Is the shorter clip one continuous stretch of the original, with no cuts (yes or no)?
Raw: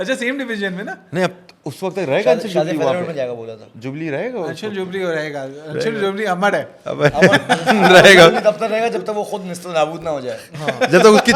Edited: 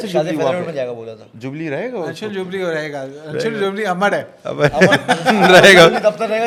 yes